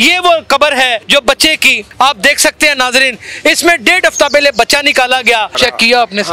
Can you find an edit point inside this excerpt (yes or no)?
yes